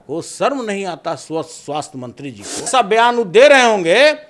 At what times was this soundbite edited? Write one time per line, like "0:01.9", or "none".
0:02.7